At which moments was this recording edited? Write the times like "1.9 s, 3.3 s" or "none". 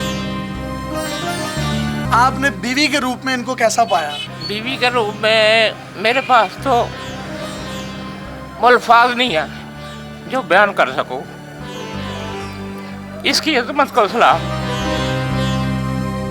2.1 s